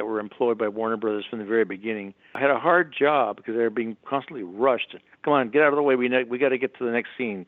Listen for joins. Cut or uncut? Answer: cut